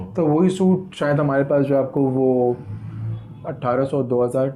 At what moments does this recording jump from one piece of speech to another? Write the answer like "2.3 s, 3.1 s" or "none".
none